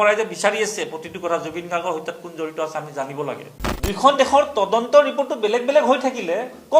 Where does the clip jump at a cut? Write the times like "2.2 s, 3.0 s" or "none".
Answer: 3.6 s